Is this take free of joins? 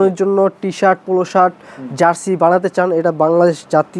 yes; 0 cuts

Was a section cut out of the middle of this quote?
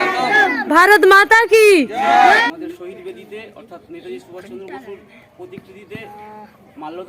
yes; 1 cut; at 2.4 s

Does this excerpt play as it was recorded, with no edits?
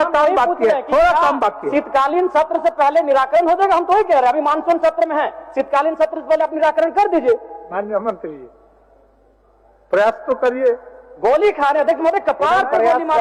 yes; 0 cuts

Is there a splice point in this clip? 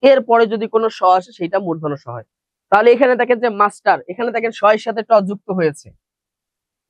no; 0 cuts

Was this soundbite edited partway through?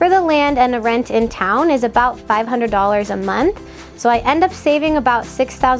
no; 0 cuts

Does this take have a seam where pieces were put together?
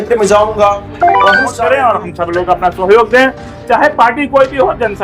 yes; 1 cut; at 1.3 s

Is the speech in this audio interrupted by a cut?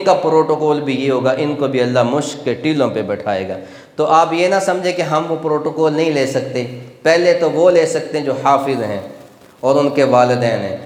no; 0 cuts

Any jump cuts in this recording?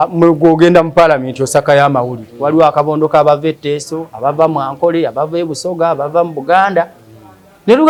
no; 0 cuts

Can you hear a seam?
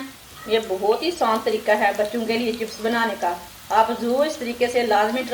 no; 0 cuts

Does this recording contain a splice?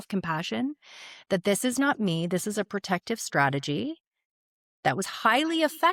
no; 0 cuts

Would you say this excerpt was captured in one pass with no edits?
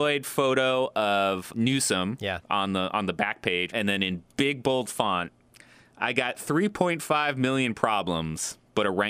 no; 2 cuts; at 1.5 s, 3.7 s

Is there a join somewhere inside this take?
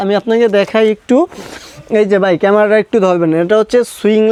no; 0 cuts

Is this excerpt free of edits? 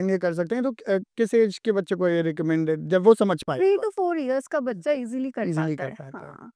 yes; 0 cuts

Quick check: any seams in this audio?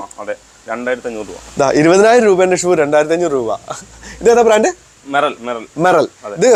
no; 0 cuts

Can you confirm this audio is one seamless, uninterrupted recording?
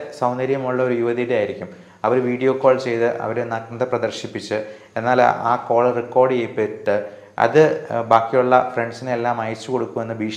yes; 0 cuts

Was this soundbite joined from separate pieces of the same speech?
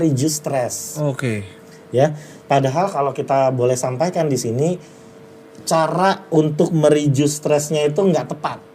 no; 0 cuts

